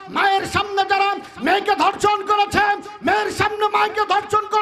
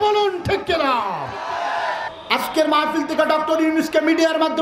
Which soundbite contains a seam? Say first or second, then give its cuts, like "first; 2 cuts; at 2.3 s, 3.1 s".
second; 1 cut; at 2.1 s